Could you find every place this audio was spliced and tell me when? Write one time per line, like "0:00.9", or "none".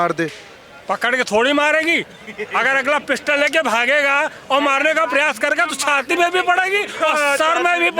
none